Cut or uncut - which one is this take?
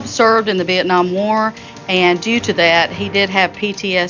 uncut